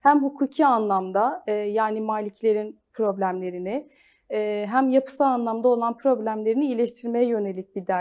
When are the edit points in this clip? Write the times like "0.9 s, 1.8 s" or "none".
none